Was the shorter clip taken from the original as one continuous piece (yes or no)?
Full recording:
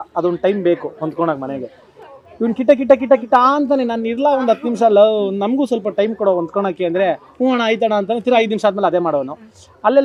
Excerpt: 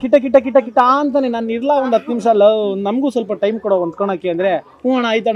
yes